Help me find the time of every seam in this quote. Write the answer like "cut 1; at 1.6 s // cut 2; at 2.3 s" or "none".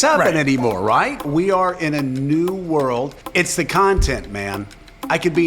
cut 1; at 1.3 s // cut 2; at 3.2 s